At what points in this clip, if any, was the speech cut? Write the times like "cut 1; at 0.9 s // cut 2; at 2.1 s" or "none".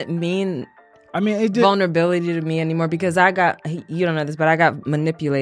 none

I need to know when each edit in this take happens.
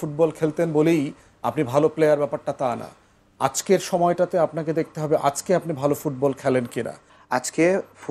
cut 1; at 7.1 s

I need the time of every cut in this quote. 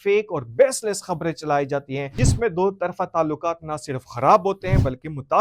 cut 1; at 2.1 s

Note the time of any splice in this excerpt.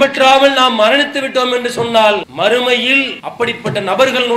cut 1; at 2.3 s // cut 2; at 3.2 s

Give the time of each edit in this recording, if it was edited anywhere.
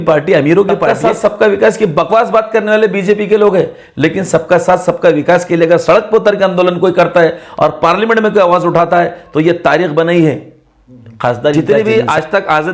cut 1; at 0.9 s // cut 2; at 11.5 s

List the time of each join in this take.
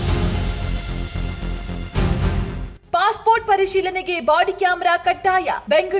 cut 1; at 2.9 s

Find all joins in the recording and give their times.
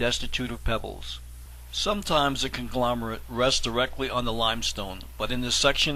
none

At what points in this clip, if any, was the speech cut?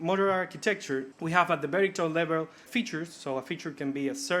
cut 1; at 1.1 s // cut 2; at 2.6 s

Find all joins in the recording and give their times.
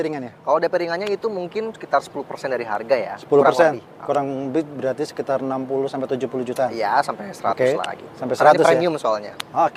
none

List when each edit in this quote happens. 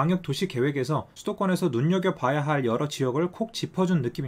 cut 1; at 1.1 s

